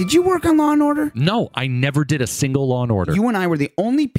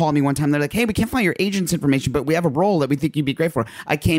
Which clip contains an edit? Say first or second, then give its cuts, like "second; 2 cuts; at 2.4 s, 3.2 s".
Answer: first; 2 cuts; at 1.1 s, 3.1 s